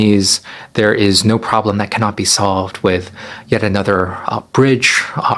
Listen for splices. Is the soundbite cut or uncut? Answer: uncut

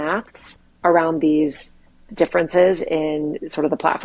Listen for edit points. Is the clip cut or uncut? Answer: cut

